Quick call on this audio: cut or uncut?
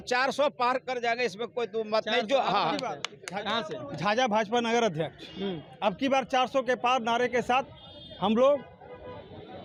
uncut